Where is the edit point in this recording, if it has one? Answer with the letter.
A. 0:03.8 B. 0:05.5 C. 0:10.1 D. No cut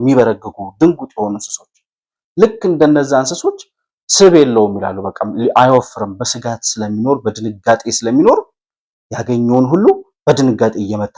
D